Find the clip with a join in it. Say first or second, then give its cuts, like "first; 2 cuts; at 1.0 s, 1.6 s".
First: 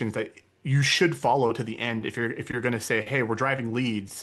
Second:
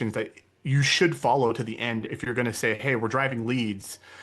second; 1 cut; at 2.1 s